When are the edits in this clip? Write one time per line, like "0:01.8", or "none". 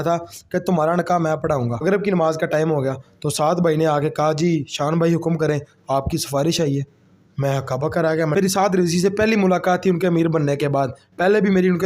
0:01.8
0:08.3